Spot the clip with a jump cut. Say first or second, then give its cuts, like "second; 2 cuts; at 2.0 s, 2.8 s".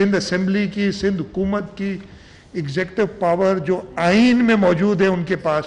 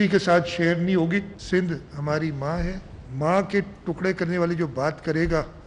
second; 1 cut; at 1.3 s